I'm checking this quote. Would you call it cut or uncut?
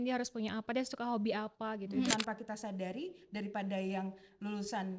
cut